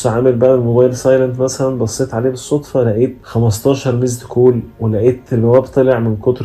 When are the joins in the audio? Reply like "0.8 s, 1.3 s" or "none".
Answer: 3.2 s